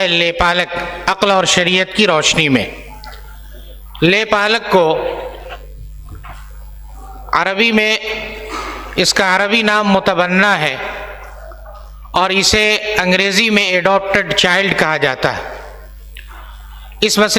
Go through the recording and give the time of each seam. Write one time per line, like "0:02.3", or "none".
none

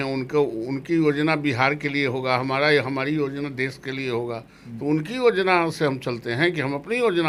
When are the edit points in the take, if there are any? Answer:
none

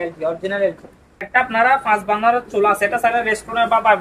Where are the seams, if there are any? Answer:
0:01.5

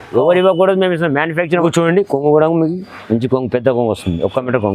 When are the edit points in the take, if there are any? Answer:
0:01.6

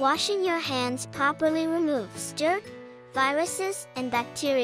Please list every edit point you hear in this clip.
0:02.6

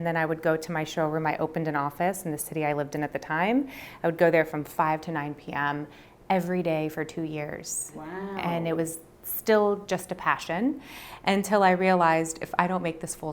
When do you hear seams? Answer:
none

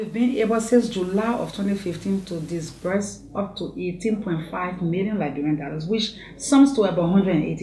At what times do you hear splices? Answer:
none

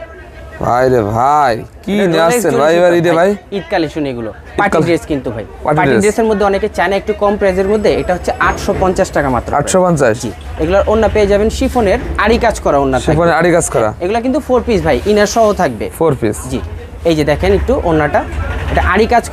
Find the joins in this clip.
none

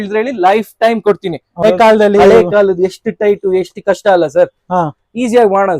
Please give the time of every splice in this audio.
0:01.6

